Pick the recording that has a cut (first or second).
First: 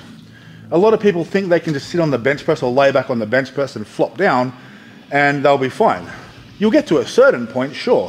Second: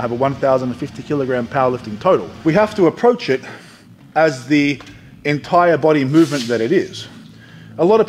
second